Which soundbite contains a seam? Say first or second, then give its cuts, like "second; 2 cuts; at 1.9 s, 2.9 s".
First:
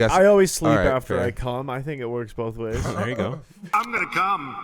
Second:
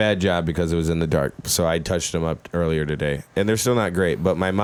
first; 1 cut; at 3.5 s